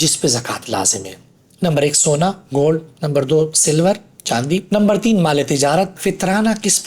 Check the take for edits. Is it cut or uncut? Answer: cut